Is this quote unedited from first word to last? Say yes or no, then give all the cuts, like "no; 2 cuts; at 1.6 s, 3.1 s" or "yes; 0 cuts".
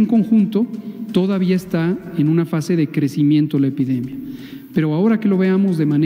yes; 0 cuts